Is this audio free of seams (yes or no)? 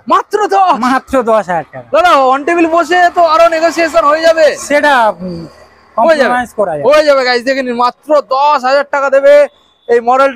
yes